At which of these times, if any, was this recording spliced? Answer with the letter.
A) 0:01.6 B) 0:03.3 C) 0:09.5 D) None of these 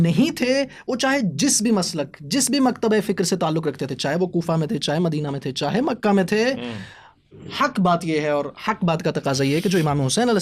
D